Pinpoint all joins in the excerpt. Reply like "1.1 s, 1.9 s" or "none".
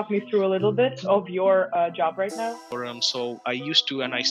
2.7 s